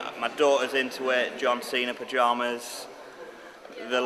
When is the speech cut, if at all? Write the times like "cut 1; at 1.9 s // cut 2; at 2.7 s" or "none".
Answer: none